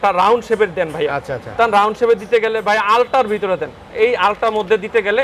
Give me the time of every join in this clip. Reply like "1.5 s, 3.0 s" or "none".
none